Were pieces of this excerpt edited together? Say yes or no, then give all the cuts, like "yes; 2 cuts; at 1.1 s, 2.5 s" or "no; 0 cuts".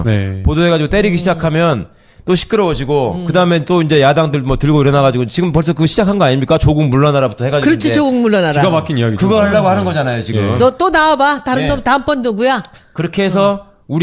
no; 0 cuts